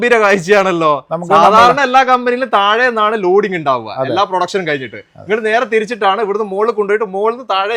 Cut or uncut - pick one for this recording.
uncut